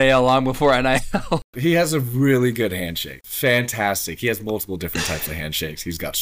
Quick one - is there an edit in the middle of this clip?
yes; 2 cuts; at 1.5 s, 3.2 s

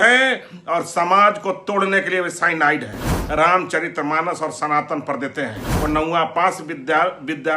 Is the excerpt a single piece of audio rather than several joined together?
no; 2 cuts; at 3.1 s, 5.6 s

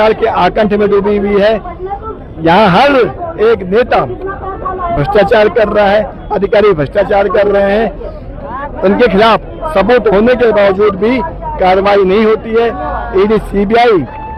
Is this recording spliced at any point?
no; 0 cuts

